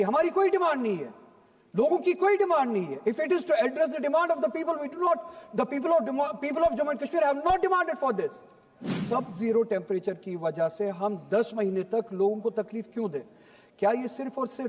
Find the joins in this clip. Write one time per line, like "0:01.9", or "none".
0:09.0